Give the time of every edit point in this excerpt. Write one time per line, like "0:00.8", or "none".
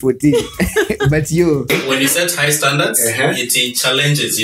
0:01.7